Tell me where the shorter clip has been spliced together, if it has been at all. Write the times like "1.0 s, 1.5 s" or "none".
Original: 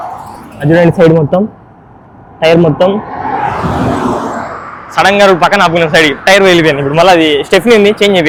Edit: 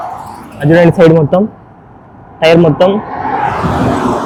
none